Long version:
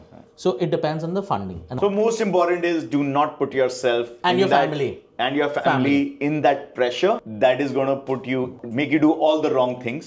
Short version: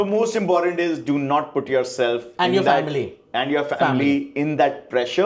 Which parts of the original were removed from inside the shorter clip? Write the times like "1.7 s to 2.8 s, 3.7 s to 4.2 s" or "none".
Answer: none